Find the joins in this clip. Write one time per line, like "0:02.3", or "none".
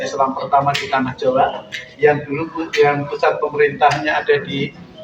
none